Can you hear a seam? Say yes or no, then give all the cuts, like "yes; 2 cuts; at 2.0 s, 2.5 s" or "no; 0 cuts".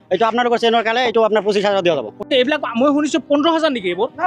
yes; 1 cut; at 2.2 s